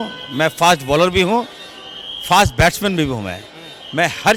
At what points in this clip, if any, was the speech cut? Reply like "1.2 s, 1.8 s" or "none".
none